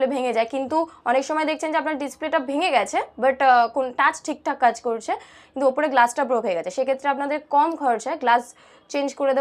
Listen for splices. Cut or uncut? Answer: uncut